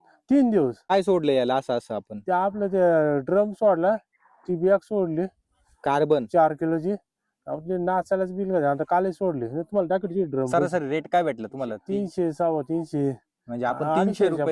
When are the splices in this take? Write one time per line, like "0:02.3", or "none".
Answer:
0:00.9
0:10.5